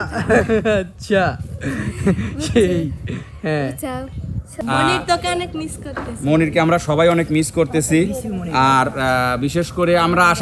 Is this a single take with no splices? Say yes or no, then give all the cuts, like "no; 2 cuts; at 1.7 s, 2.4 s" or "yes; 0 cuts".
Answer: no; 1 cut; at 4.4 s